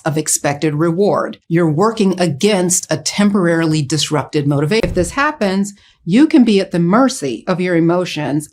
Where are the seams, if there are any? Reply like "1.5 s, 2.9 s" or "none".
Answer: 4.8 s